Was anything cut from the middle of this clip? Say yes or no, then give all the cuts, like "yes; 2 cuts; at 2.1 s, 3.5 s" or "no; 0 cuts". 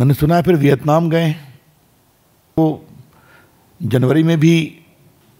yes; 1 cut; at 2.6 s